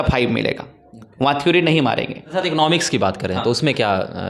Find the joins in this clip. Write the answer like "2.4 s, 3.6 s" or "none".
2.2 s